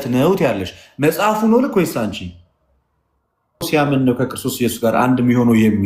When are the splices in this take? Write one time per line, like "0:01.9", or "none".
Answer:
0:03.7